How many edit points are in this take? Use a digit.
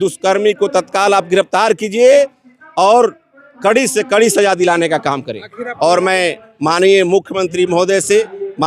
1